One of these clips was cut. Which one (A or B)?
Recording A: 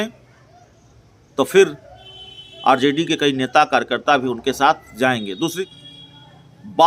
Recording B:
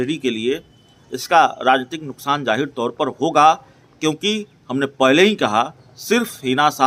A